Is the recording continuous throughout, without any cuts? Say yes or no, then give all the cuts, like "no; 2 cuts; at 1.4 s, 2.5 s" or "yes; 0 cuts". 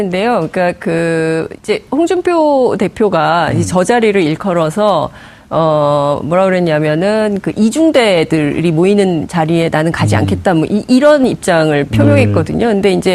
no; 1 cut; at 5.6 s